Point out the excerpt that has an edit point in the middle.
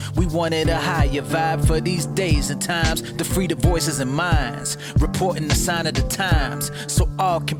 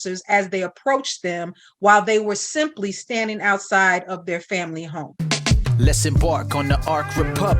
second; 1 cut; at 5.0 s

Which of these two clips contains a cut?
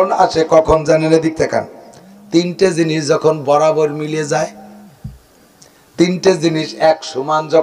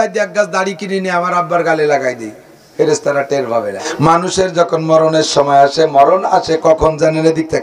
second; 1 cut; at 3.9 s

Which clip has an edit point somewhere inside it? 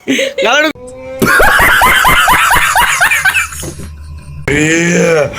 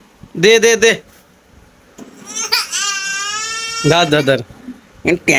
first; 2 cuts; at 0.7 s, 4.5 s

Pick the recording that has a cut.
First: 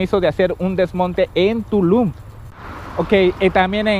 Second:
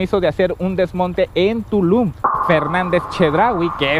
second; 1 cut; at 2.4 s

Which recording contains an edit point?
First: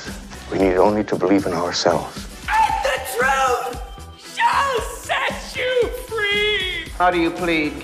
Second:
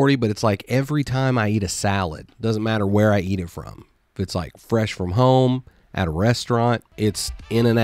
second; 1 cut; at 6.9 s

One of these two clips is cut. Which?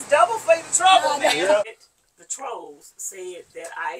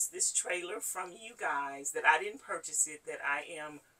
first; 1 cut; at 1.6 s

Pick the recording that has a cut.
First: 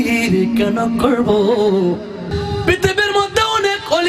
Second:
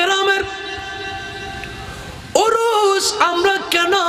first; 1 cut; at 2.3 s

